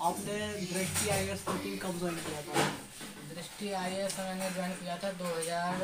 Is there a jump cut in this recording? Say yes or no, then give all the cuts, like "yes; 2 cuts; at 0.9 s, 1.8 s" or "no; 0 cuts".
no; 0 cuts